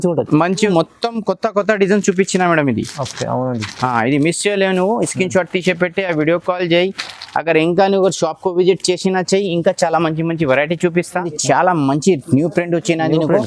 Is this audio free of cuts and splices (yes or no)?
no